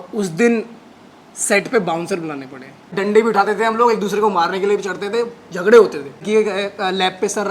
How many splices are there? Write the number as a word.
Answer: two